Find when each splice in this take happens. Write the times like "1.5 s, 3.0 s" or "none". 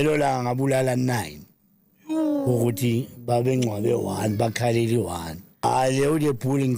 5.6 s